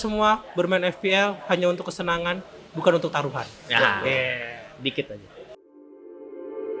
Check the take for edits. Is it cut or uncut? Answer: cut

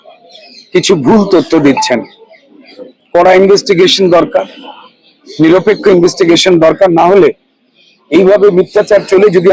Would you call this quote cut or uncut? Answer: uncut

